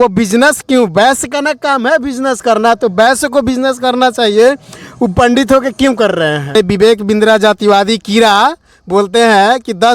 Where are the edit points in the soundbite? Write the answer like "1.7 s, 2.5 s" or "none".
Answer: 6.5 s

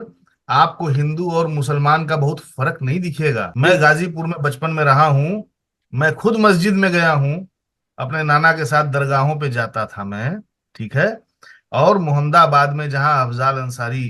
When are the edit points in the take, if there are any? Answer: 3.5 s

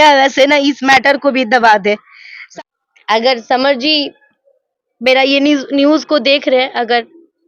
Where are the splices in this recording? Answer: 2.4 s

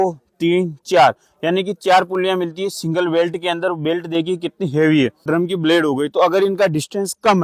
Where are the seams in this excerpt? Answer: 5.3 s

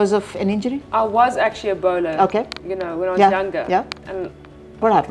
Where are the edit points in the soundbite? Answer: none

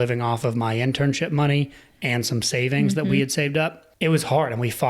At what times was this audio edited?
3.8 s

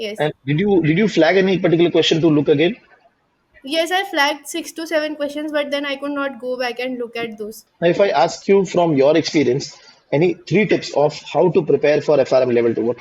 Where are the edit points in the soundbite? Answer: 7.6 s

